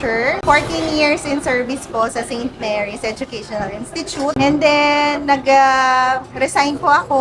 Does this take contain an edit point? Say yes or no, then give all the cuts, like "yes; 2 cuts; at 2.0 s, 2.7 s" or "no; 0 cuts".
no; 0 cuts